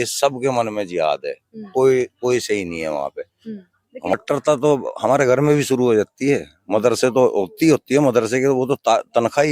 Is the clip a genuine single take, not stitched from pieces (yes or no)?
no